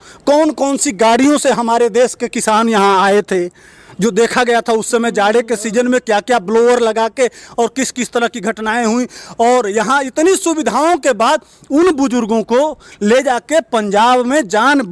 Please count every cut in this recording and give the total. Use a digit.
0